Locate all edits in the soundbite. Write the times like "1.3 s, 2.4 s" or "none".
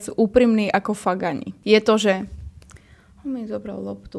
1.5 s